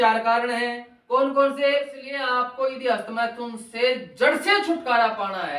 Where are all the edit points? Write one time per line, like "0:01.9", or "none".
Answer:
0:02.1